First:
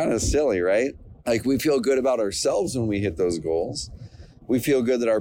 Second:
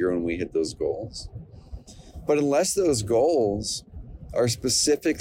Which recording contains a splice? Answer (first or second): first